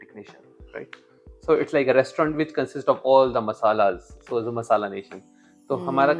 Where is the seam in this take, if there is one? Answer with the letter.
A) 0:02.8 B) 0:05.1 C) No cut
C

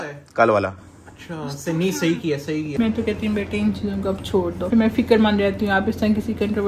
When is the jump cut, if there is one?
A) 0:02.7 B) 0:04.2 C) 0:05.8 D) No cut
A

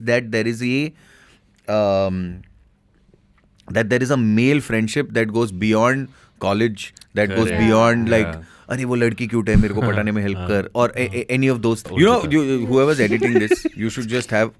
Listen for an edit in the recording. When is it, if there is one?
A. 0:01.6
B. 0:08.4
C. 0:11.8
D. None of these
C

